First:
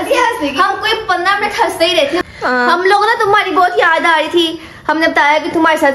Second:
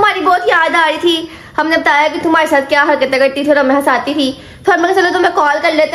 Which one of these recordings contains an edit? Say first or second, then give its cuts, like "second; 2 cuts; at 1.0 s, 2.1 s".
first; 1 cut; at 2.2 s